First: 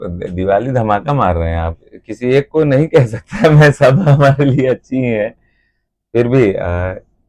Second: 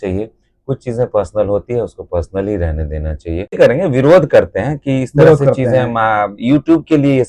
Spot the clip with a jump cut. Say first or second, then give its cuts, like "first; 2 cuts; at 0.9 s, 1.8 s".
second; 1 cut; at 3.6 s